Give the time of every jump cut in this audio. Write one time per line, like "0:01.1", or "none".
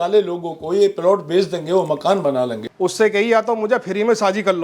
0:02.6